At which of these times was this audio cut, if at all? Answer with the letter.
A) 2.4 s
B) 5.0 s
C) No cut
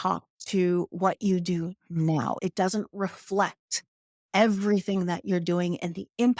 A